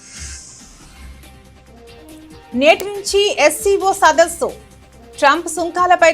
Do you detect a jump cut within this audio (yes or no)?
no